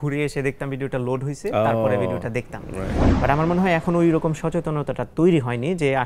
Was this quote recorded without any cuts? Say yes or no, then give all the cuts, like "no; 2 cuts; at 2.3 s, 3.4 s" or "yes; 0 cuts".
no; 1 cut; at 3.0 s